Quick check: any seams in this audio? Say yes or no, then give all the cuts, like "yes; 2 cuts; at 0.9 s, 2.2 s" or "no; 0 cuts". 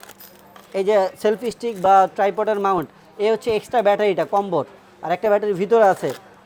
no; 0 cuts